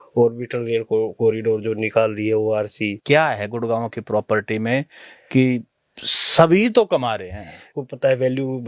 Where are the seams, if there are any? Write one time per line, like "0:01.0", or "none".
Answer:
0:03.0
0:07.7